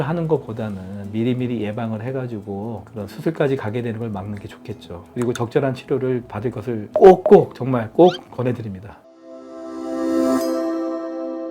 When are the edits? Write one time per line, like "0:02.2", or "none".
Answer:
0:05.1
0:08.9